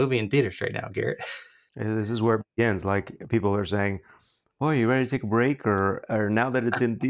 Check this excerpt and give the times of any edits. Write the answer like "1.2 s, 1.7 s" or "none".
1.7 s